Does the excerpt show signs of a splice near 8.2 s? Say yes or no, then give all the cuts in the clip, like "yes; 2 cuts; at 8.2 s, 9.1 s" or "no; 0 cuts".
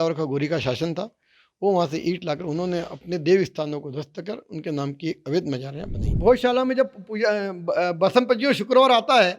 no; 1 cut; at 6.1 s